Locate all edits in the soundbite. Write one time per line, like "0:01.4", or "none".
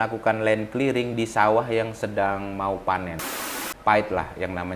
0:03.3

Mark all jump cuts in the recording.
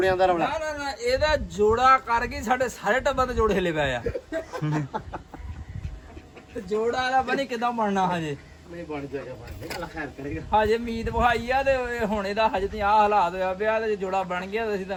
none

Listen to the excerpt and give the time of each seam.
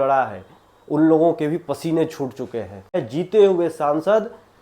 0:03.0

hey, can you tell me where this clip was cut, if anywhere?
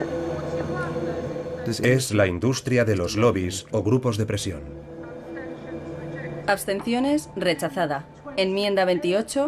0:06.0

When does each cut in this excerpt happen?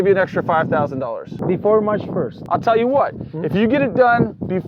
0:01.3
0:02.4

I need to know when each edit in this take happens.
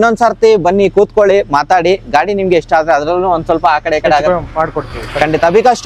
none

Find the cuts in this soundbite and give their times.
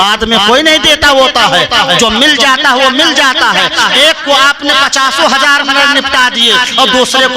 0:03.9

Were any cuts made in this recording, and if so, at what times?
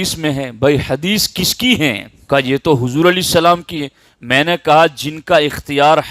0:02.1

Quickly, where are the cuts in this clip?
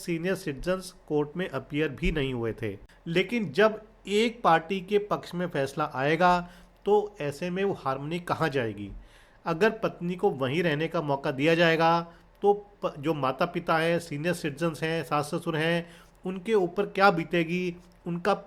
0:02.8

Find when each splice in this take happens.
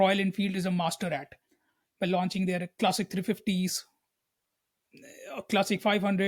none

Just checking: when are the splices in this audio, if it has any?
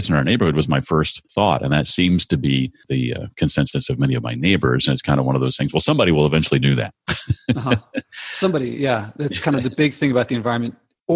0:01.2
0:02.8

